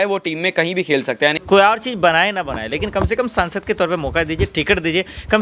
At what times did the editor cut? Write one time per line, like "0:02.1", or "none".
0:01.4